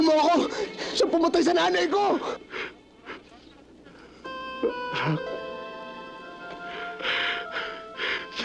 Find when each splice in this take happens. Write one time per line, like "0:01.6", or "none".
0:06.6